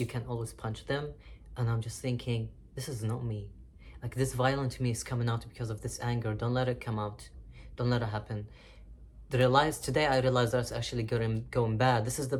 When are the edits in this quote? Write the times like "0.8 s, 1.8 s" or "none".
none